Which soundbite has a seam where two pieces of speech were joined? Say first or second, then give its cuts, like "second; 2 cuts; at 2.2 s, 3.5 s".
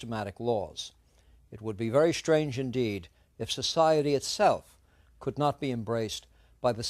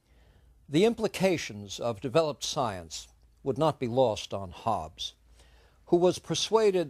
second; 1 cut; at 4.5 s